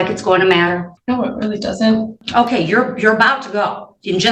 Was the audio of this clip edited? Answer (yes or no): yes